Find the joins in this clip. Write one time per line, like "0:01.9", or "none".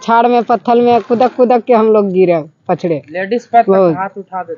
none